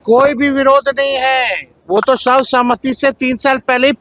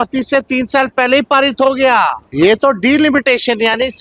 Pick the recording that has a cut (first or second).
second